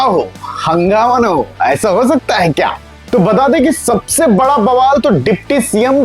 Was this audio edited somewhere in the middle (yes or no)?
no